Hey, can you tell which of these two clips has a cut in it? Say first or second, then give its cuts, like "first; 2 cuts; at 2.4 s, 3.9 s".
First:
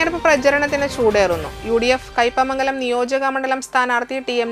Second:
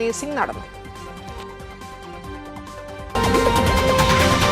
second; 1 cut; at 3.1 s